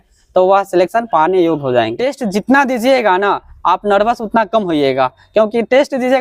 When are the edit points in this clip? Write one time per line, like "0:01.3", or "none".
0:02.0